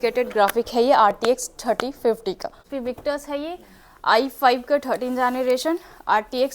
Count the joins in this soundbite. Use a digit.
1